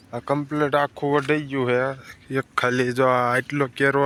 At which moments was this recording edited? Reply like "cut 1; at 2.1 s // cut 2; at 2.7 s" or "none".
none